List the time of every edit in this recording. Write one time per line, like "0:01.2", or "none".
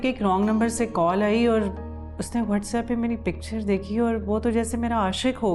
none